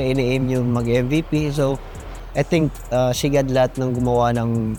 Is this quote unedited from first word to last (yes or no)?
yes